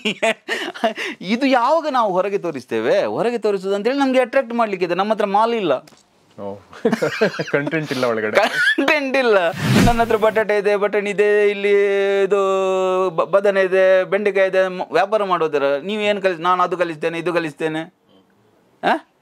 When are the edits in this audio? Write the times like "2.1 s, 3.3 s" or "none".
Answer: none